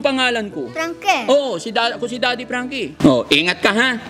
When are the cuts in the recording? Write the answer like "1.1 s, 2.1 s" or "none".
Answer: 2.9 s